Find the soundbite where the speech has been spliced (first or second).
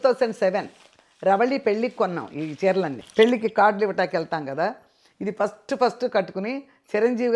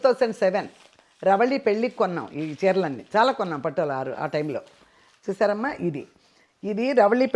first